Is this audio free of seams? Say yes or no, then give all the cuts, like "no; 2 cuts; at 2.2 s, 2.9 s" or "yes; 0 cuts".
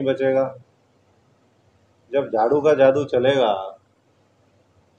yes; 0 cuts